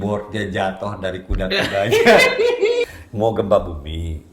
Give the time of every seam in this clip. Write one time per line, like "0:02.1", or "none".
0:02.9